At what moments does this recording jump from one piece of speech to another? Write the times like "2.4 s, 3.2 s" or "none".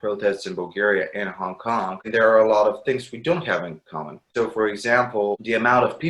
none